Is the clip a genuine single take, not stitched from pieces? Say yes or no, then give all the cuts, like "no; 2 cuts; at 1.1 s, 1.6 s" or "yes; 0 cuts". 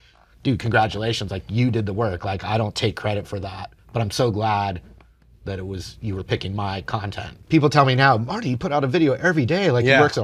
no; 1 cut; at 7.4 s